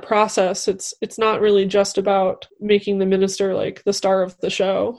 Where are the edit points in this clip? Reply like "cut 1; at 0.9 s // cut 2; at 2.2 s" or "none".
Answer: cut 1; at 2.5 s